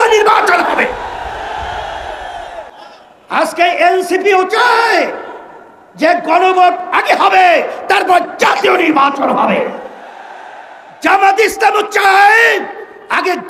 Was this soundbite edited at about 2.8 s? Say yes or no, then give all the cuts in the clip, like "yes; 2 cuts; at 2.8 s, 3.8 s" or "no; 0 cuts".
yes; 1 cut; at 2.8 s